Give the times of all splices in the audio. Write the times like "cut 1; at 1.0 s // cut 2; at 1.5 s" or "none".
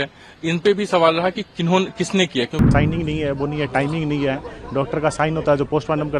cut 1; at 2.6 s